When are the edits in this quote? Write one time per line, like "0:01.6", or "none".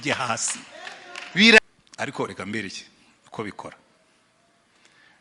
0:01.6